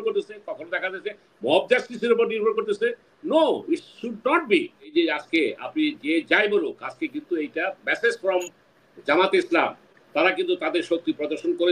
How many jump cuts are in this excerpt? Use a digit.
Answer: 1